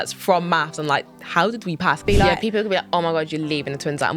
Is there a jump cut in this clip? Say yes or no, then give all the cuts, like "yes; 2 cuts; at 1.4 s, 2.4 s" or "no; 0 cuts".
yes; 1 cut; at 2.0 s